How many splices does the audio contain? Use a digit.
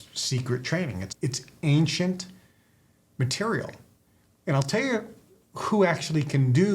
1